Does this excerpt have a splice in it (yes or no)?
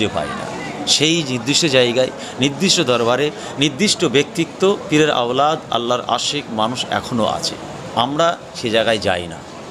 no